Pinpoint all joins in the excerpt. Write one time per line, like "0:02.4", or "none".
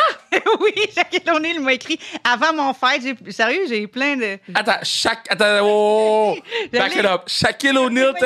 0:04.4